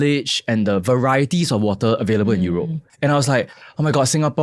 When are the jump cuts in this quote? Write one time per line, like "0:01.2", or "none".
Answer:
0:02.8